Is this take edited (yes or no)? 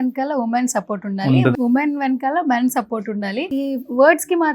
yes